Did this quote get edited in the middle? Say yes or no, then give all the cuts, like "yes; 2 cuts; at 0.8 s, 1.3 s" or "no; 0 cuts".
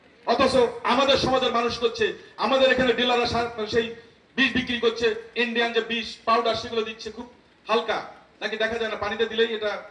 no; 0 cuts